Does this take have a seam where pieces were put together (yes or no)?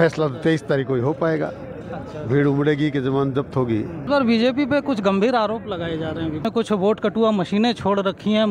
yes